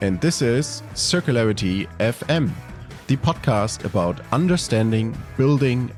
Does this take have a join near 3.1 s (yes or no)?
no